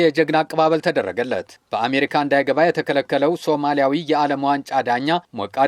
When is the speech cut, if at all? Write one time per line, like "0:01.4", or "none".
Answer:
none